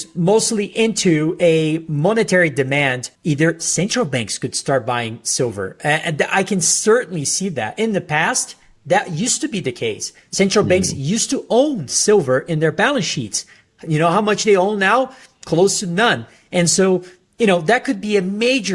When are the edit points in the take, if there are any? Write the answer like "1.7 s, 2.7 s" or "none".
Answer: 3.1 s